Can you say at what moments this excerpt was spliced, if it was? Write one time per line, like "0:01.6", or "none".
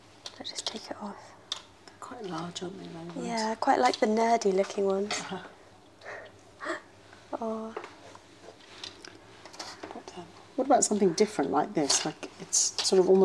none